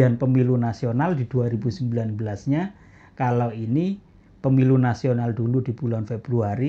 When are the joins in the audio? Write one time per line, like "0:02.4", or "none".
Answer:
none